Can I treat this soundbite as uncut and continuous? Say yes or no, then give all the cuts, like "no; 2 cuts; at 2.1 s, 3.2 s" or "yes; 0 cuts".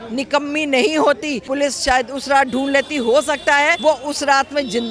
no; 2 cuts; at 1.4 s, 3.8 s